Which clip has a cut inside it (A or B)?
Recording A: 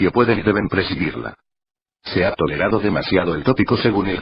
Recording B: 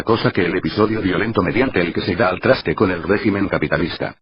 A